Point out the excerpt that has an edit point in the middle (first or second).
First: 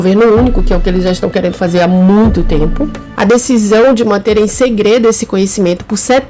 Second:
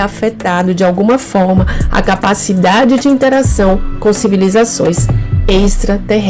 first